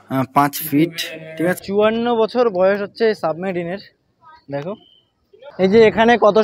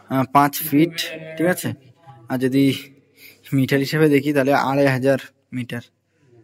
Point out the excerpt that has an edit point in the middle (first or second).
first